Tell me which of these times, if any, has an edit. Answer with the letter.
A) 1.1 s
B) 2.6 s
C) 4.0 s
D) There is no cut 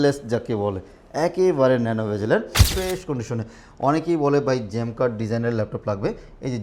B